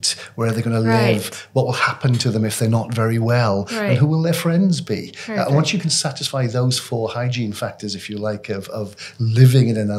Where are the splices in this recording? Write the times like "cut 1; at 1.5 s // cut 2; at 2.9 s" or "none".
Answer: none